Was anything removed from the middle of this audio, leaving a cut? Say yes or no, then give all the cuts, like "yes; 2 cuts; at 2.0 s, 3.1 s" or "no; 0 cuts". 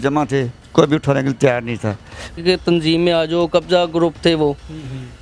yes; 1 cut; at 2.4 s